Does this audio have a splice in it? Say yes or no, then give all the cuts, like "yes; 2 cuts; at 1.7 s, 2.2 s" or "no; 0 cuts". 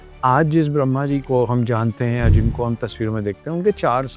no; 0 cuts